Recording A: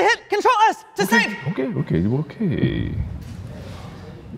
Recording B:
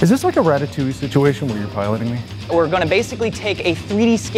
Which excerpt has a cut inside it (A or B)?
B